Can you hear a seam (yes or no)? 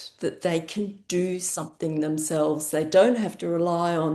no